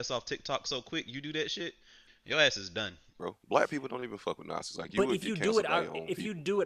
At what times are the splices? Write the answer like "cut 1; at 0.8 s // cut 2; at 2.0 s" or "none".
cut 1; at 2.1 s // cut 2; at 3.1 s